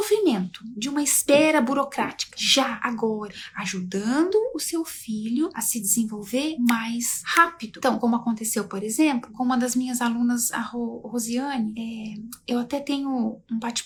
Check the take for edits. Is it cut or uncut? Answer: uncut